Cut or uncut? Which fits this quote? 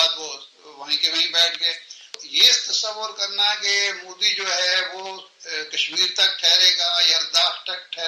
cut